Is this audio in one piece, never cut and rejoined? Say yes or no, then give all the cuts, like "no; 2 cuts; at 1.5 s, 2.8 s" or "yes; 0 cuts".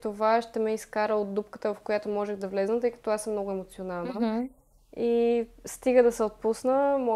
yes; 0 cuts